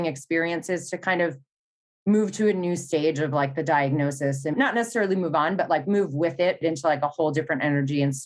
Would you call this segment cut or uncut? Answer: cut